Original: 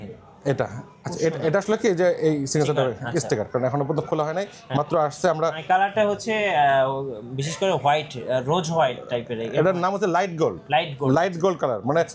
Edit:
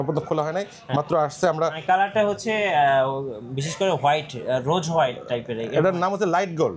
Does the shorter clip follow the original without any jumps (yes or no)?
yes